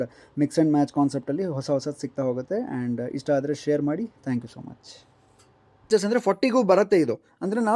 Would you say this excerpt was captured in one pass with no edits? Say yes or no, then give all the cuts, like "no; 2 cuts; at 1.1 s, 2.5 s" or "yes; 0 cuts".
no; 1 cut; at 5.9 s